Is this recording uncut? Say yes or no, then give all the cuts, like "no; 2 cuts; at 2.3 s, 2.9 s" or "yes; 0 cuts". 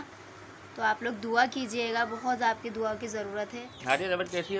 no; 1 cut; at 3.7 s